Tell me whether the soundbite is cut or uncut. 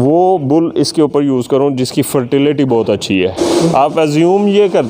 cut